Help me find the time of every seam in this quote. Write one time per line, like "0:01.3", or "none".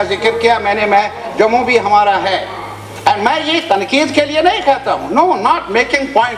none